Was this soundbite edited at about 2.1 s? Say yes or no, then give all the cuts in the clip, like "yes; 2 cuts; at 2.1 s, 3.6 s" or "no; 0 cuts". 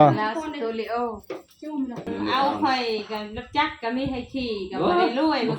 yes; 1 cut; at 2.1 s